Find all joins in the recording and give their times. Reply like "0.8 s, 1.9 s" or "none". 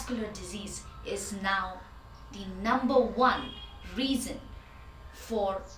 none

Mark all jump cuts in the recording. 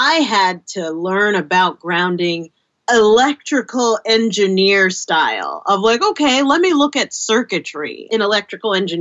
2.7 s, 8.0 s

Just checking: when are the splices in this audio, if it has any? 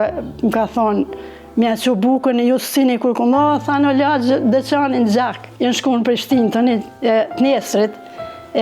5.4 s

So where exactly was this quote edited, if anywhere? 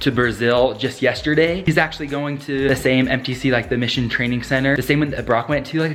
none

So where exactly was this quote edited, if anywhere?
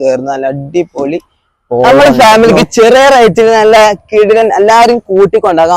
1.9 s

